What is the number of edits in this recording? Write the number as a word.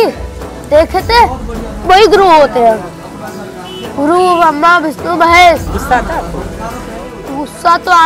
one